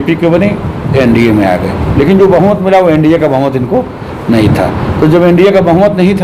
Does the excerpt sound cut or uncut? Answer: uncut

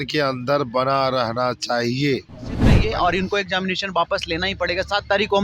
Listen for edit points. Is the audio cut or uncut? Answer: cut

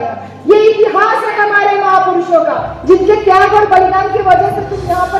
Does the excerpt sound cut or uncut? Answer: uncut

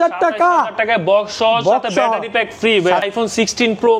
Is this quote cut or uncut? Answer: cut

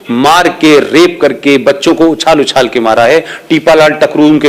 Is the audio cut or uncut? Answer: uncut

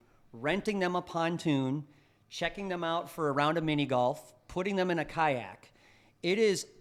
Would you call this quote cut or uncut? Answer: uncut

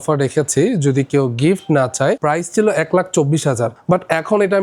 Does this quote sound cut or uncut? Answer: cut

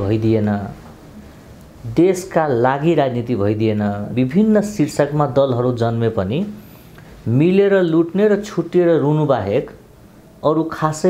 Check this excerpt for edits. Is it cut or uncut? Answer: cut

